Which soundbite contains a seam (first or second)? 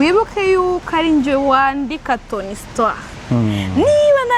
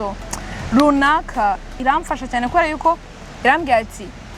second